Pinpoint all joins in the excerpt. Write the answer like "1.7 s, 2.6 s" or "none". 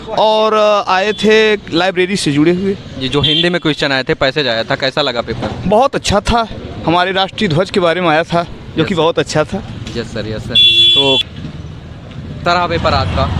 11.2 s